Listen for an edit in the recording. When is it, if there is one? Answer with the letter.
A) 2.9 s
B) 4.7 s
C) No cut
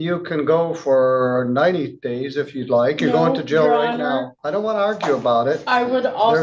B